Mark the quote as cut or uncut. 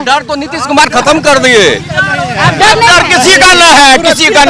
uncut